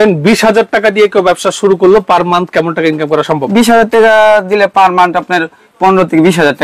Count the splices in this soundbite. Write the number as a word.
zero